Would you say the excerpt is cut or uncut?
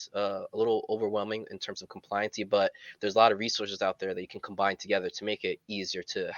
uncut